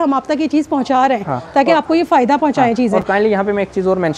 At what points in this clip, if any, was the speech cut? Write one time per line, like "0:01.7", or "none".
none